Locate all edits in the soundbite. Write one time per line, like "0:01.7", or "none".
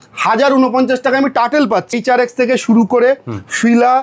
0:02.0